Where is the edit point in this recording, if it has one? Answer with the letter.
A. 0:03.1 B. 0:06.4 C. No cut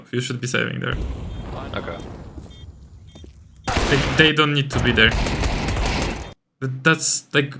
C